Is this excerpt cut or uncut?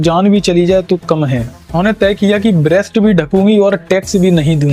uncut